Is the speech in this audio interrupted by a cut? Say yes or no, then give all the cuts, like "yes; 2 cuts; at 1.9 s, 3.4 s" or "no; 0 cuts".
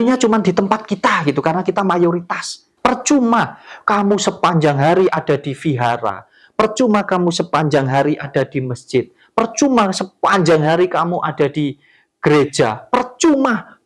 yes; 1 cut; at 2.7 s